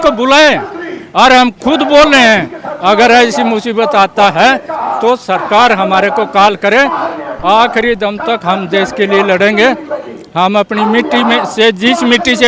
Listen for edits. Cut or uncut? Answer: uncut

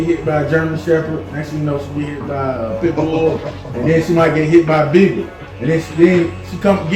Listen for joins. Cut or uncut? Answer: uncut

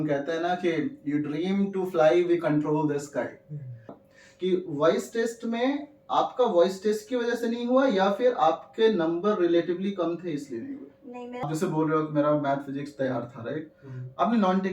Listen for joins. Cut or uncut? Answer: cut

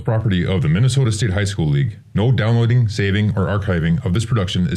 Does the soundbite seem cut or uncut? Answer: uncut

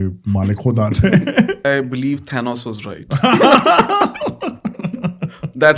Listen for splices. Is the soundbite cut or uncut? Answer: cut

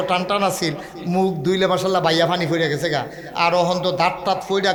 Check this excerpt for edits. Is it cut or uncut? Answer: uncut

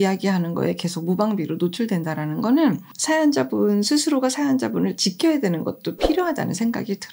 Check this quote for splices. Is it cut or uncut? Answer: uncut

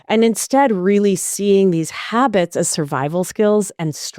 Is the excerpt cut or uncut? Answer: uncut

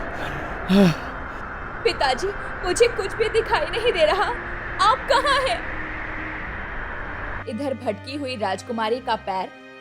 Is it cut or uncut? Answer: cut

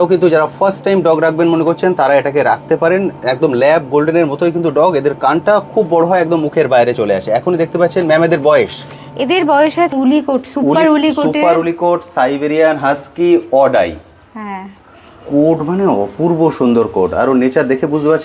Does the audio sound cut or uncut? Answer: cut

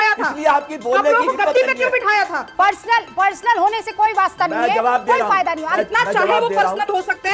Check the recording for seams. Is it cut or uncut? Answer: cut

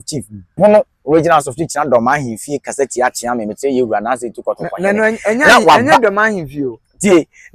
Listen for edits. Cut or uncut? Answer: uncut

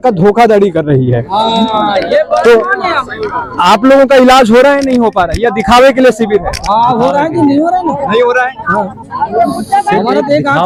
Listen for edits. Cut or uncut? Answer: uncut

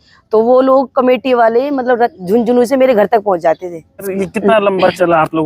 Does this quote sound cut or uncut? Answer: cut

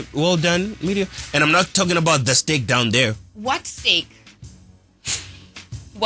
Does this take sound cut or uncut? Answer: uncut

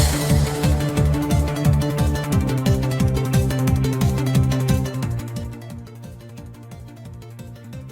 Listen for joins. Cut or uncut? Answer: uncut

